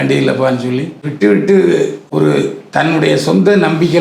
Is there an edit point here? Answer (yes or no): yes